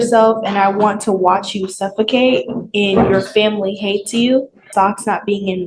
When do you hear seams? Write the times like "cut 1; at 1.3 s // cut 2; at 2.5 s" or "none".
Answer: cut 1; at 4.7 s